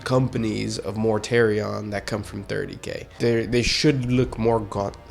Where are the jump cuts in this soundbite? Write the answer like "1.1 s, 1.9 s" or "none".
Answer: 3.1 s